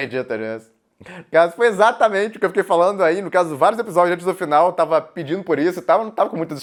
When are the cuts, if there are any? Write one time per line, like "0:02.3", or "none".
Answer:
none

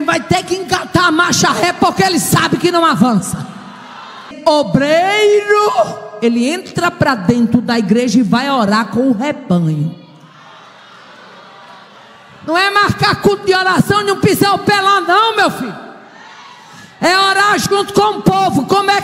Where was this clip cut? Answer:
0:04.3

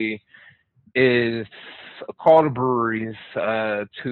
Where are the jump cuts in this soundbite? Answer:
none

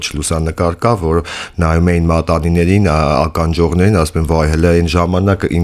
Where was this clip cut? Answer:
none

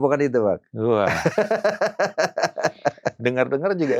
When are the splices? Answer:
none

